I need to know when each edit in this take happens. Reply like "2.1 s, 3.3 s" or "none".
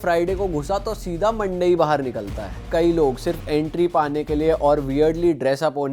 2.6 s